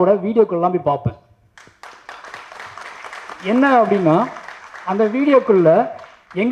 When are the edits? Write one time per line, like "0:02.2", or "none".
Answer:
none